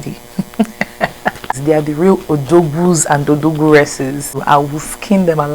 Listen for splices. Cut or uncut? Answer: cut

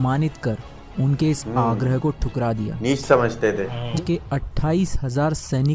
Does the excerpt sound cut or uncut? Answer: cut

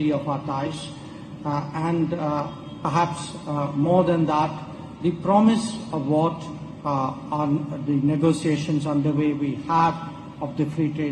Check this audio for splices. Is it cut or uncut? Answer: uncut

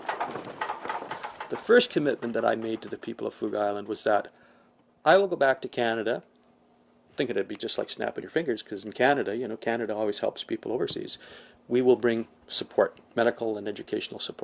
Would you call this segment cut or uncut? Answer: cut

